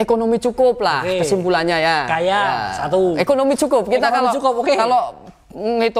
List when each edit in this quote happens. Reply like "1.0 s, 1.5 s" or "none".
none